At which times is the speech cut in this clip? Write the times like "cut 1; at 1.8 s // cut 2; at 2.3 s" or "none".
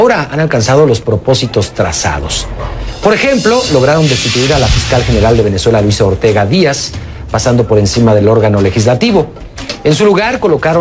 cut 1; at 1.3 s

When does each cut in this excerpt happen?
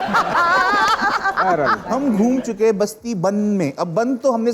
cut 1; at 1.8 s

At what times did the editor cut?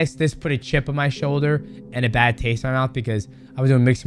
none

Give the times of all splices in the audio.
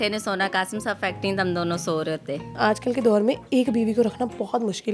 cut 1; at 2.6 s

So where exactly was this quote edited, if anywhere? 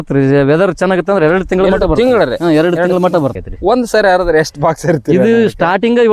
cut 1; at 3.5 s

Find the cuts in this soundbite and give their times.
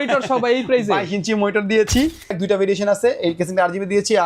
cut 1; at 2.4 s

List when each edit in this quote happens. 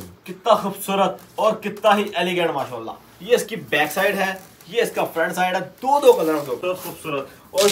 cut 1; at 6.6 s

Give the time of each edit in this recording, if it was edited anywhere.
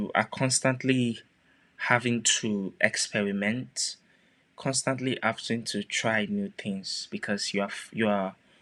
none

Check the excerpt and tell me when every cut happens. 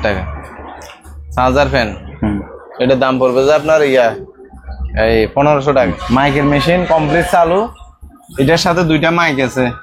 cut 1; at 6.0 s

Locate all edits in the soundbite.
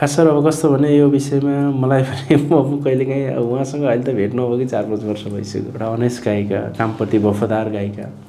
cut 1; at 5.7 s

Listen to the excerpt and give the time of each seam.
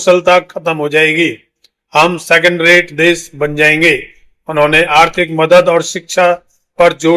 none

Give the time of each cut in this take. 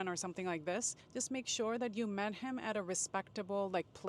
cut 1; at 1.0 s

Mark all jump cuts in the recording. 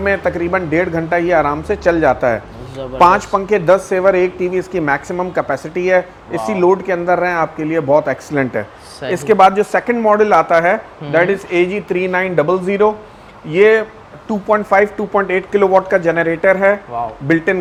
none

